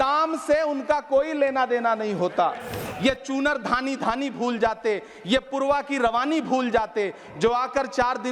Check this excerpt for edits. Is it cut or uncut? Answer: cut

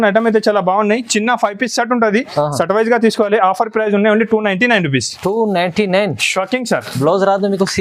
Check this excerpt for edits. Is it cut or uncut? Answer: uncut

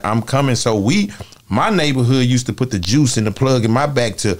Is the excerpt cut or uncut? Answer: uncut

